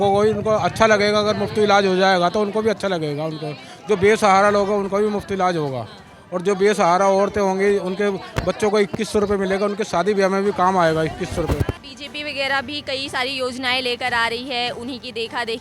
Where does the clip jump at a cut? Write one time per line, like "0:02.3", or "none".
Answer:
0:11.7